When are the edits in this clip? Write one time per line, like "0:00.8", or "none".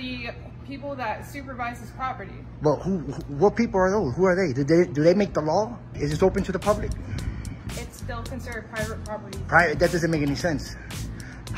0:06.0